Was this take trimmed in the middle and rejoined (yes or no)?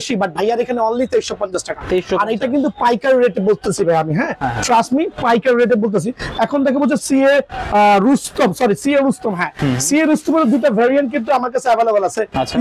no